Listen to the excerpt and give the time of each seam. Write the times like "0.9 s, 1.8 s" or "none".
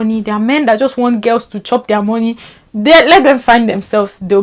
none